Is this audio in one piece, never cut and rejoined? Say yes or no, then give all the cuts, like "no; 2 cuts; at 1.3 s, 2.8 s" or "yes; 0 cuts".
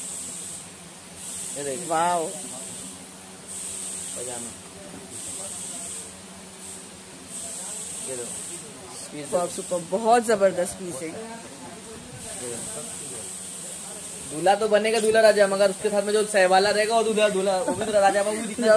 yes; 0 cuts